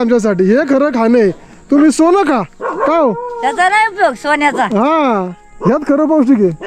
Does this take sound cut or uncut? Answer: uncut